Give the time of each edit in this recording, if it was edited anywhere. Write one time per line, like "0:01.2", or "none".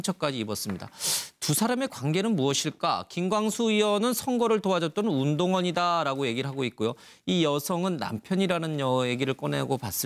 0:08.0